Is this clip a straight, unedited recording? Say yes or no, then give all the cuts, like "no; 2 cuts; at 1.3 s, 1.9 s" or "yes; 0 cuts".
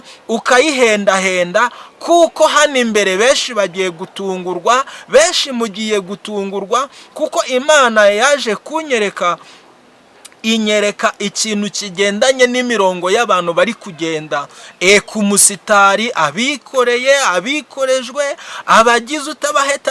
yes; 0 cuts